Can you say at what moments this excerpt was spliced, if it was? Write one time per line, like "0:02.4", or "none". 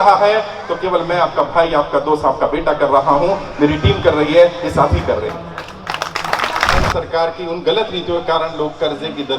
0:06.8